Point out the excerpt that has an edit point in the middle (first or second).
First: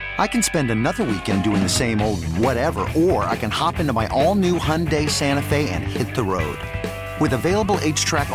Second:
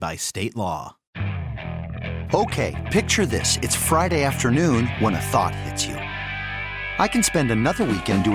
second